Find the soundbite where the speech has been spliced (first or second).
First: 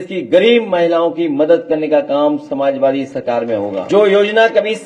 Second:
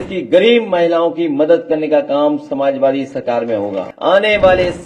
second